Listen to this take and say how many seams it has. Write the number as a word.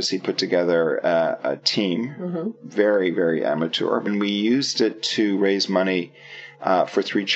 one